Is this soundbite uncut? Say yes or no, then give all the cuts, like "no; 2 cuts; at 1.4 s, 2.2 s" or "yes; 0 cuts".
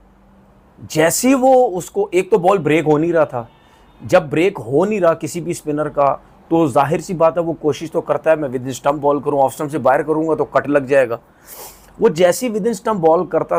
yes; 0 cuts